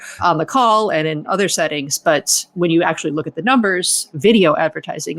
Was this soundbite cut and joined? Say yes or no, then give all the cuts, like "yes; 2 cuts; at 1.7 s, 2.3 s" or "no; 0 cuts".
yes; 1 cut; at 4.1 s